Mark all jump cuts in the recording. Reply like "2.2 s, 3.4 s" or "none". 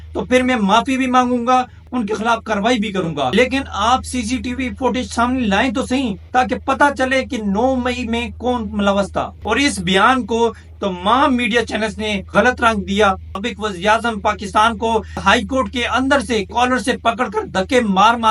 1.8 s, 3.3 s, 9.3 s, 13.4 s, 15.2 s